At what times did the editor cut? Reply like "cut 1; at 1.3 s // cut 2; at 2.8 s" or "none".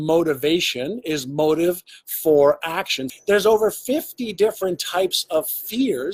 cut 1; at 3.1 s